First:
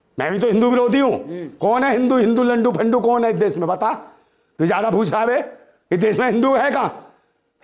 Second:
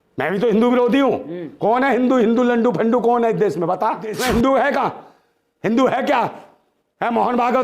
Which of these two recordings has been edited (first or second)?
second